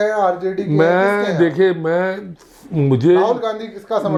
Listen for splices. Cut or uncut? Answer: uncut